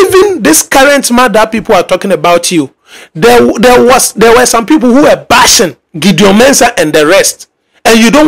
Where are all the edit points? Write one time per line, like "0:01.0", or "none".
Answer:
0:05.8